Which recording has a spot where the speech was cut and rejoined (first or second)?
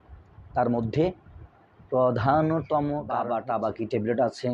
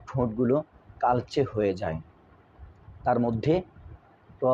first